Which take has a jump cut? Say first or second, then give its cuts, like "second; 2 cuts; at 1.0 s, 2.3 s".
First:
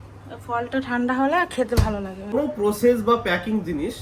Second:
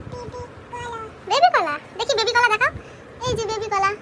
first; 1 cut; at 2.3 s